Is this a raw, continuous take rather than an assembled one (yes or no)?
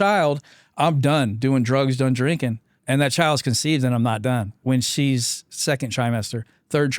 no